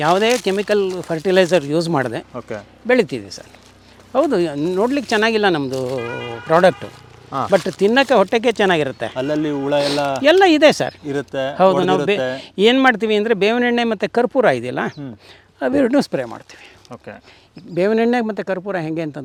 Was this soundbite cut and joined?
no; 0 cuts

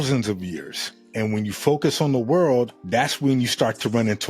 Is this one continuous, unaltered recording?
no; 1 cut; at 1.0 s

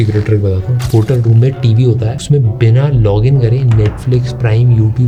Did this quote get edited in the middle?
no; 0 cuts

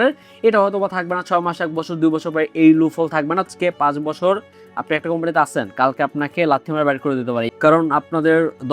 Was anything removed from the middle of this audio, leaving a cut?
yes; 2 cuts; at 3.5 s, 7.5 s

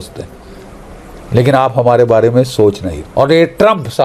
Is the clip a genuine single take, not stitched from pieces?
yes; 0 cuts

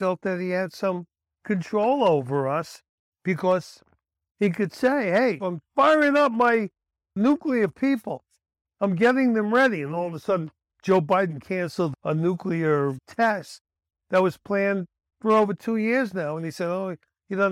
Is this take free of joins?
no; 1 cut; at 13.0 s

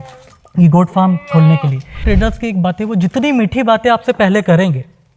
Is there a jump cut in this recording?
yes; 1 cut; at 2.0 s

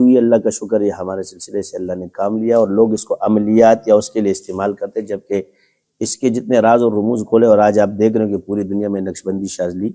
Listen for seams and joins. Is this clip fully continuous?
yes; 0 cuts

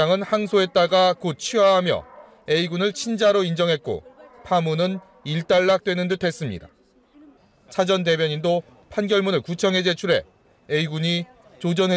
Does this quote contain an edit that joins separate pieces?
yes; 1 cut; at 5.8 s

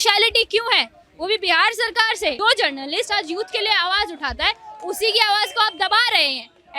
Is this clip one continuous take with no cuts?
no; 1 cut; at 2.4 s

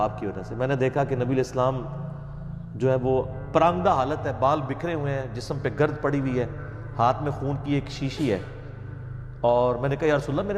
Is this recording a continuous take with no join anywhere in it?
yes; 0 cuts

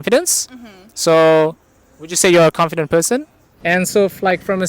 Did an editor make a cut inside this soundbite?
yes; 1 cut; at 3.6 s

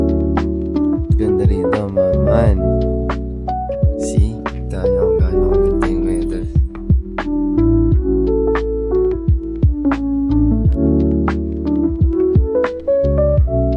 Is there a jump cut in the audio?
no; 0 cuts

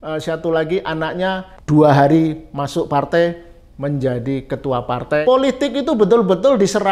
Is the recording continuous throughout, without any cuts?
no; 2 cuts; at 1.5 s, 5.2 s

